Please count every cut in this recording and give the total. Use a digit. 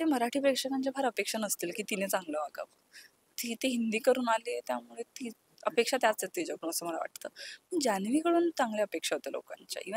0